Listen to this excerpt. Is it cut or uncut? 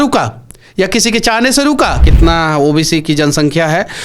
cut